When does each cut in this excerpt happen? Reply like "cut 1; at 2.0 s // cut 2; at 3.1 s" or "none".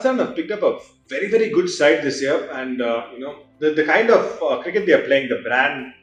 none